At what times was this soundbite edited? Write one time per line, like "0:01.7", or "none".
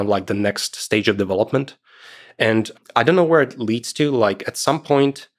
0:02.7